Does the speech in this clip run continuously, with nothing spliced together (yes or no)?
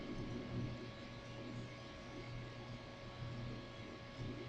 no